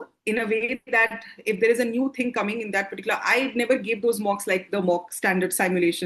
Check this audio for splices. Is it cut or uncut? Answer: uncut